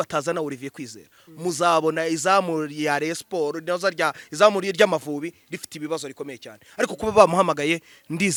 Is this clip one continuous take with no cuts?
yes; 0 cuts

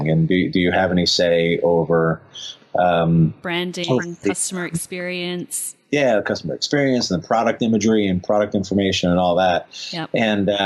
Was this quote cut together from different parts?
no; 0 cuts

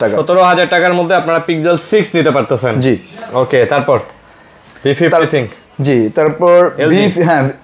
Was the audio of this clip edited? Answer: no; 0 cuts

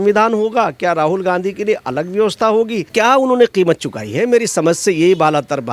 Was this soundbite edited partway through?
yes; 1 cut; at 2.9 s

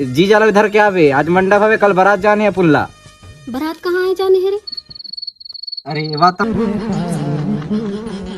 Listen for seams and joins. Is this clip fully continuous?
no; 1 cut; at 6.4 s

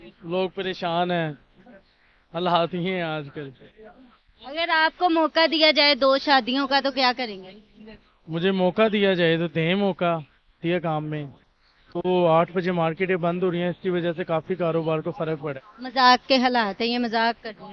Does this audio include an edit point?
yes; 2 cuts; at 10.6 s, 15.7 s

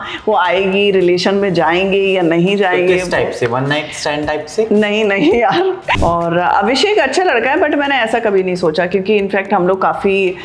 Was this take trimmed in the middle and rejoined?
yes; 1 cut; at 6.0 s

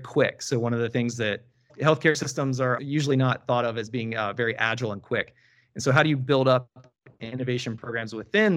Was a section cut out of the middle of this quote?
no; 0 cuts

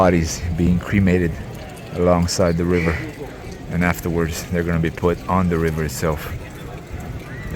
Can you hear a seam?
no; 0 cuts

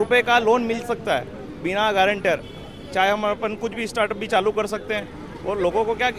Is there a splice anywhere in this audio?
no; 0 cuts

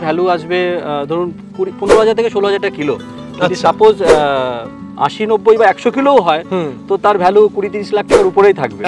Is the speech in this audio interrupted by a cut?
no; 0 cuts

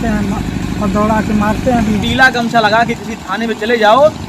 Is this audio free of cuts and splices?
no; 1 cut; at 2.0 s

